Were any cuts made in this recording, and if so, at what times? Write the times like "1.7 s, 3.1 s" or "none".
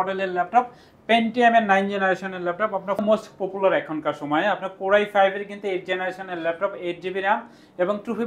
3.0 s